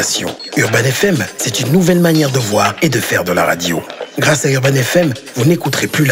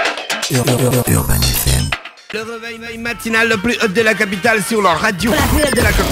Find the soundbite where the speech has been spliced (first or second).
second